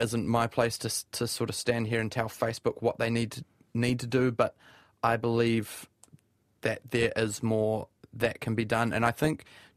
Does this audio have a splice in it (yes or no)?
no